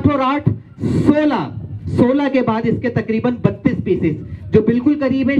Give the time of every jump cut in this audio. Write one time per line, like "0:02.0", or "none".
none